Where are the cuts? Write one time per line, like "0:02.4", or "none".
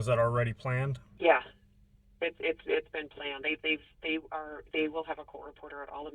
0:01.0